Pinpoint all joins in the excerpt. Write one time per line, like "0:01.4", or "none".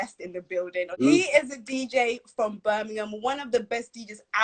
0:01.0